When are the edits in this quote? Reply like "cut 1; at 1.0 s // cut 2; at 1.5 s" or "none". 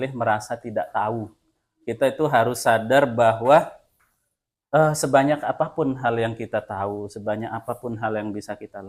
none